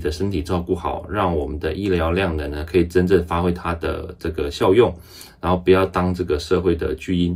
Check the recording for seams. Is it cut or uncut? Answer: uncut